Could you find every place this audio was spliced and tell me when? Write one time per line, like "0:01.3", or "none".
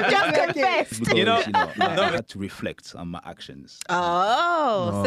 0:02.2